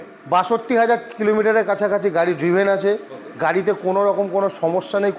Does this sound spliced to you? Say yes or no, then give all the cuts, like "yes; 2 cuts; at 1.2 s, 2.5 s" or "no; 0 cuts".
no; 0 cuts